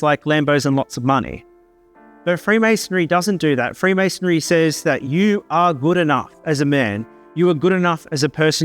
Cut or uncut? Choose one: uncut